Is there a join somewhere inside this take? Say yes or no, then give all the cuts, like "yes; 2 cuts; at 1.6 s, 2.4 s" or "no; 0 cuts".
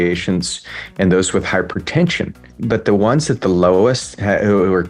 yes; 1 cut; at 2.5 s